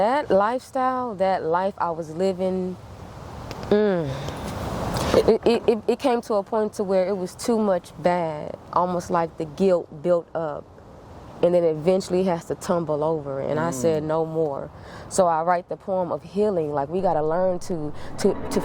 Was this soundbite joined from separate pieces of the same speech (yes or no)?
no